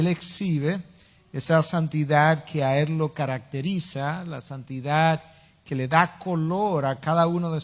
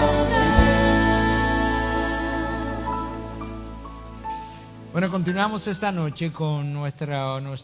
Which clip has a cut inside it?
first; 1 cut; at 6.1 s

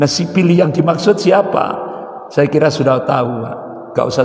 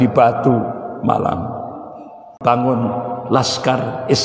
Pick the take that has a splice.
second; 1 cut; at 2.3 s

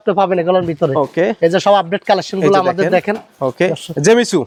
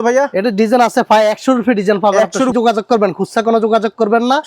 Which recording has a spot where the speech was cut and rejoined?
second; 1 cut; at 2.5 s

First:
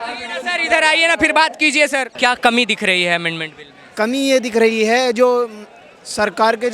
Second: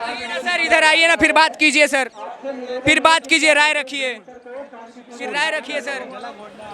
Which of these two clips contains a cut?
first; 1 cut; at 2.1 s

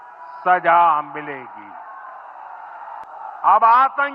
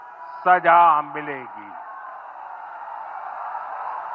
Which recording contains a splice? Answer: first; 1 cut; at 3.1 s

